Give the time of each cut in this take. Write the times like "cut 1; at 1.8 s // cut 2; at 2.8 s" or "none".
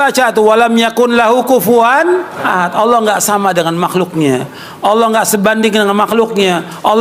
cut 1; at 2.3 s